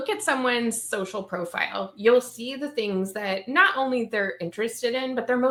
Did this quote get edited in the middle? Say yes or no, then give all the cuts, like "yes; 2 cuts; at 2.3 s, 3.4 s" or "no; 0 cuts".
no; 0 cuts